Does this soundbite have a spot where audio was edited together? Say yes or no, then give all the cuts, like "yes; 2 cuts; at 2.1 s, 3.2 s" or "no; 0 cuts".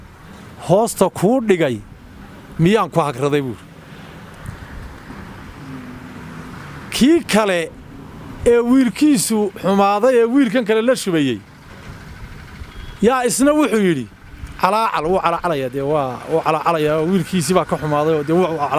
no; 0 cuts